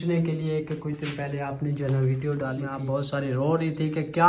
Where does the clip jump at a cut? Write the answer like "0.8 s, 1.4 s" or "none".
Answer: 2.7 s